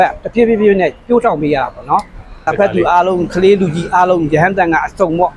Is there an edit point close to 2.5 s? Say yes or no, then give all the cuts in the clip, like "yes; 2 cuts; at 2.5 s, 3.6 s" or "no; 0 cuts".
yes; 1 cut; at 2.5 s